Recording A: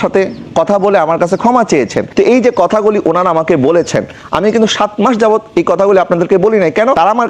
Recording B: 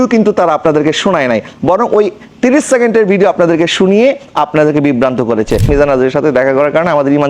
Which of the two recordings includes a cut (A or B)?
B